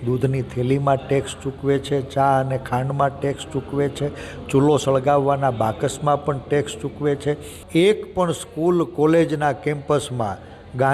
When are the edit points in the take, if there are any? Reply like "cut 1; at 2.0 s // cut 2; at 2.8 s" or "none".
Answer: cut 1; at 7.5 s